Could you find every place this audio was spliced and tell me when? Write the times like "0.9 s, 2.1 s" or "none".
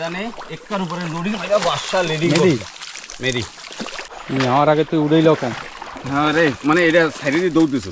4.1 s